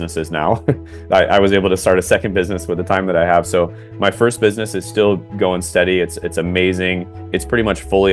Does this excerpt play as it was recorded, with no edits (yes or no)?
yes